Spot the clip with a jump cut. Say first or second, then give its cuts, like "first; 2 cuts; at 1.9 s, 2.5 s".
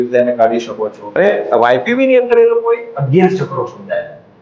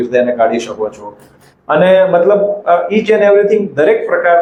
first; 1 cut; at 1.2 s